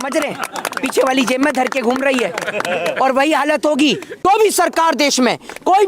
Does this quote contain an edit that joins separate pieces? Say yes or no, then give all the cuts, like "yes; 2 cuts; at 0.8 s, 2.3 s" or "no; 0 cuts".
yes; 1 cut; at 4.2 s